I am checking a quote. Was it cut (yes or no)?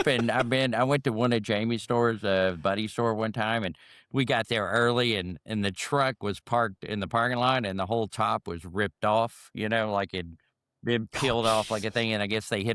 no